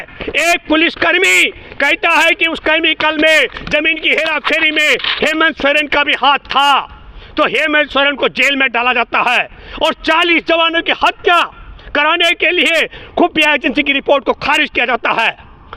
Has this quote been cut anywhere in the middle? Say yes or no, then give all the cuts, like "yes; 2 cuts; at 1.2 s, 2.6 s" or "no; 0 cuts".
no; 0 cuts